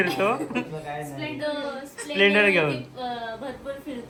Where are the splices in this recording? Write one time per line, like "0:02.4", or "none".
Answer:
none

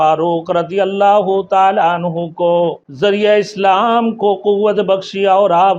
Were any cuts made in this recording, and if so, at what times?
0:02.8

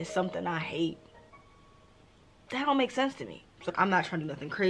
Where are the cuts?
0:01.3
0:03.7

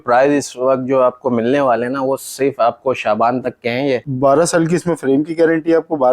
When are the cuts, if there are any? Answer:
0:04.1

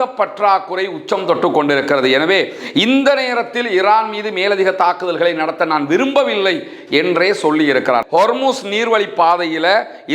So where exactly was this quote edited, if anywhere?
0:08.0

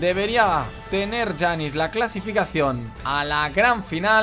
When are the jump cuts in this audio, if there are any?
0:02.9

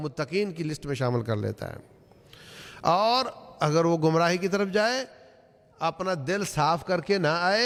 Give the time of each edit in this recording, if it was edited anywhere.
none

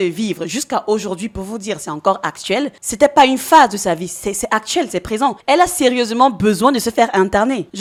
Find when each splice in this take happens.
none

